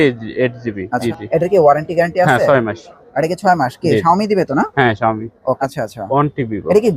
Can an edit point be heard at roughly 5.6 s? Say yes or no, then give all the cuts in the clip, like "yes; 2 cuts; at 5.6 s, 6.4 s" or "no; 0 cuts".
yes; 2 cuts; at 1.0 s, 5.6 s